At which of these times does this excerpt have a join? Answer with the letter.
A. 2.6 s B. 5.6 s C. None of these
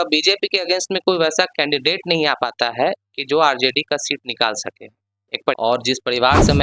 B